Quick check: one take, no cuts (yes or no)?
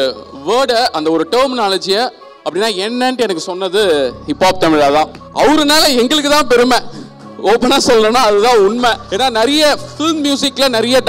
no